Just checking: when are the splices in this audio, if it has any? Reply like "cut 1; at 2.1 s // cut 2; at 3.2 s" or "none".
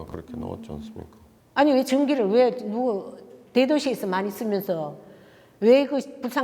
cut 1; at 1.2 s